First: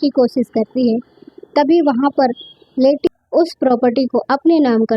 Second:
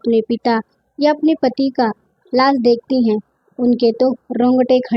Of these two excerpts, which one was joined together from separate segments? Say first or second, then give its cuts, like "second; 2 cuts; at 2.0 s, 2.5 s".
first; 1 cut; at 3.1 s